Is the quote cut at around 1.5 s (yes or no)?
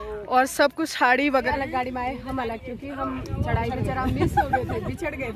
yes